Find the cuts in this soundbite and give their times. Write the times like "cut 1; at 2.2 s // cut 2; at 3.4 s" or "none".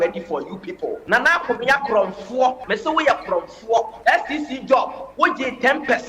cut 1; at 1.0 s // cut 2; at 2.6 s // cut 3; at 3.9 s // cut 4; at 5.0 s